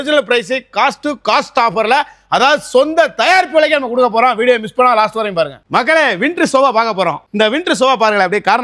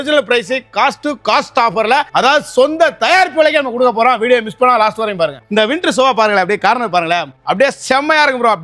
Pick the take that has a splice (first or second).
second